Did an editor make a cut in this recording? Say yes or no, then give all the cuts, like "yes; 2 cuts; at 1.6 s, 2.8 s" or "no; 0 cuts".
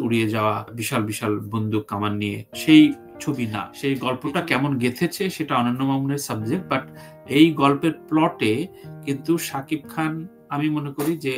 yes; 1 cut; at 3.6 s